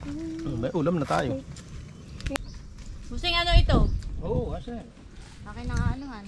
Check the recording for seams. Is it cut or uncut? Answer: cut